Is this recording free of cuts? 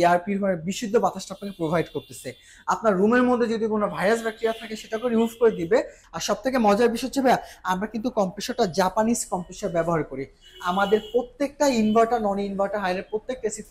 no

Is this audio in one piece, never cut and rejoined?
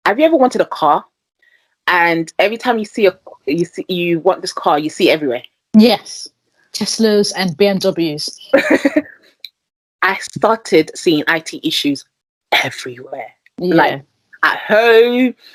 yes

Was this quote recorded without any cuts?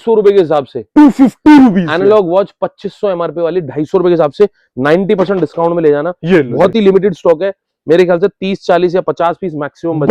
yes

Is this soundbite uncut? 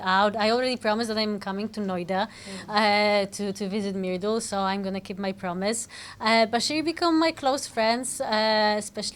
yes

